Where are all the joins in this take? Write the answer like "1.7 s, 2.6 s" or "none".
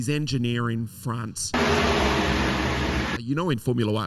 1.5 s, 3.2 s